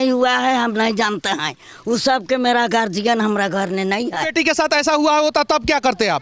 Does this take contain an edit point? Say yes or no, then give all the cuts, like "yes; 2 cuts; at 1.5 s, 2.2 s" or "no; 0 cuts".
yes; 1 cut; at 4.3 s